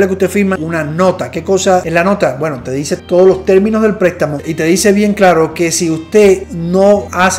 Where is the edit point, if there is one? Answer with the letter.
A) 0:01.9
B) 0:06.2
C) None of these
A